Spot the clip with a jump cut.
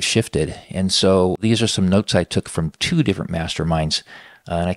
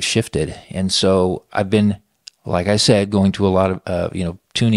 first; 1 cut; at 1.4 s

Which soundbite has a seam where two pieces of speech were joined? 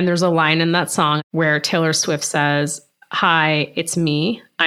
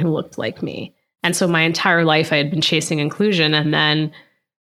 first; 1 cut; at 1.2 s

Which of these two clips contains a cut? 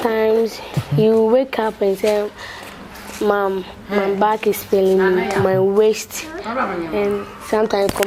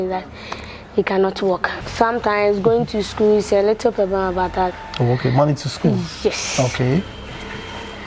second; 1 cut; at 1.7 s

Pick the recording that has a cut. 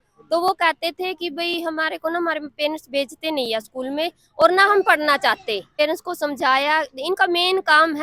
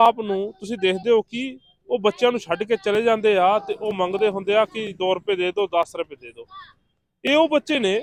first; 1 cut; at 5.7 s

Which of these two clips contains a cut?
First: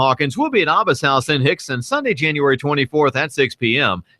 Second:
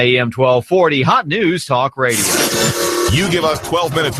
second; 1 cut; at 2.2 s

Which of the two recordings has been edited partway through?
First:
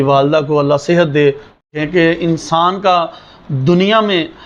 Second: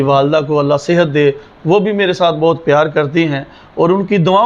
first; 1 cut; at 1.6 s

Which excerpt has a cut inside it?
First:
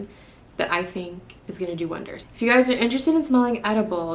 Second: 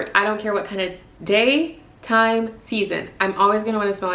first; 1 cut; at 2.2 s

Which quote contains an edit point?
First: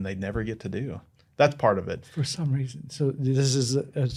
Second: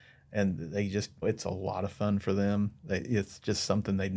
second; 1 cut; at 1.2 s

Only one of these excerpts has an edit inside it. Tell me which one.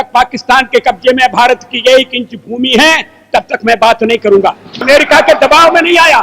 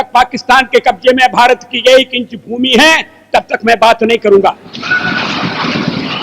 first; 1 cut; at 4.7 s

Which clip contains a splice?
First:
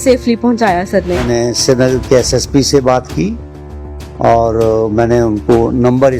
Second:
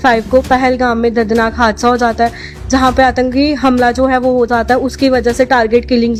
first; 1 cut; at 1.2 s

